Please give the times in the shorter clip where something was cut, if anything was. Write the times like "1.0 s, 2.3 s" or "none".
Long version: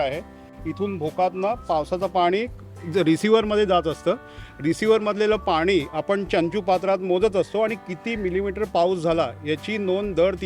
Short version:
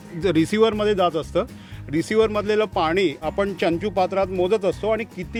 none